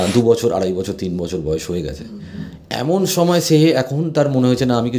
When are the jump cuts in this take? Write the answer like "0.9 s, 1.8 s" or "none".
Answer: none

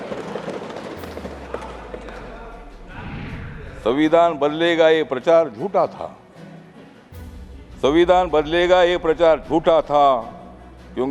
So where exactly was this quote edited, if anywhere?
none

